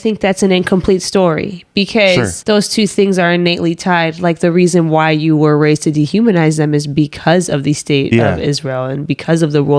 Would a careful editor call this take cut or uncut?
cut